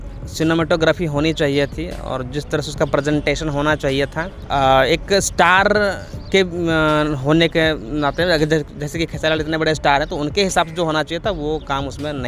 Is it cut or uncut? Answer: uncut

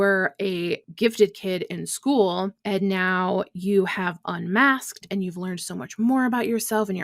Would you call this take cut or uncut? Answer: cut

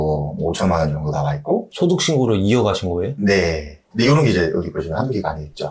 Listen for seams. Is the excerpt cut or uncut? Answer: cut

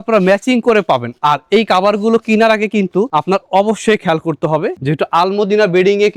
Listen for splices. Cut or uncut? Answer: uncut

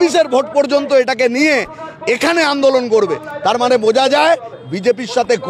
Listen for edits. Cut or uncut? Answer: uncut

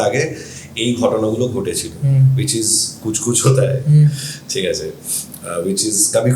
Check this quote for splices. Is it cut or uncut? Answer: uncut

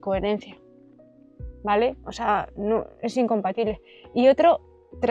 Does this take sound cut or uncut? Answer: uncut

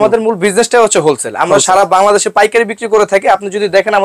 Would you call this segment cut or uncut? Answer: uncut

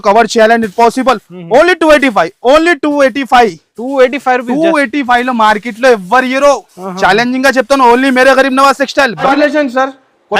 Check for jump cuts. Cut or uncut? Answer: cut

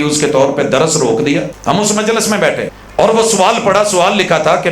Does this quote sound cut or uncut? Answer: cut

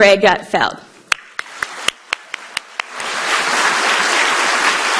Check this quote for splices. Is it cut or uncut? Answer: uncut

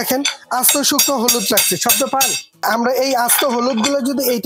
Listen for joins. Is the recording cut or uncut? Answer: cut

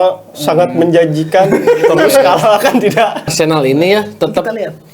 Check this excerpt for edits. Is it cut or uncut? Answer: cut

